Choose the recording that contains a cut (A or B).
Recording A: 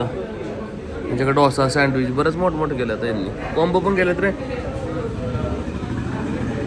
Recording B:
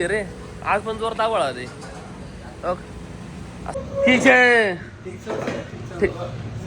B